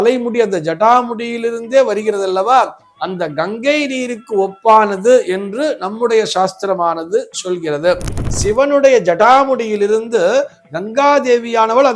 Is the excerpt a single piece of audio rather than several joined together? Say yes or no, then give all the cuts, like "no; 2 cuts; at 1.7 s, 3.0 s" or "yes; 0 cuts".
no; 1 cut; at 8.2 s